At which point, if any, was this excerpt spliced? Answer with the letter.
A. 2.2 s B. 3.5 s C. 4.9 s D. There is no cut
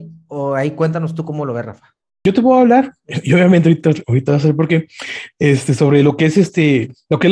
A